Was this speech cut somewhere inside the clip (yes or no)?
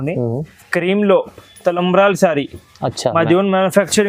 no